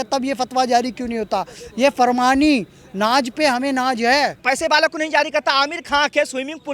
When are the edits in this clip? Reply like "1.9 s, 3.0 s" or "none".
4.4 s